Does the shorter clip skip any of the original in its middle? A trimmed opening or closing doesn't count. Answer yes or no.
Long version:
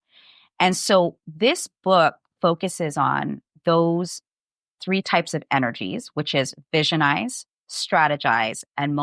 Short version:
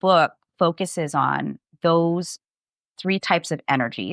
no